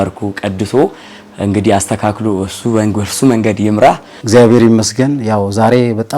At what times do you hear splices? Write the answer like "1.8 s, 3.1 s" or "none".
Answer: 4.1 s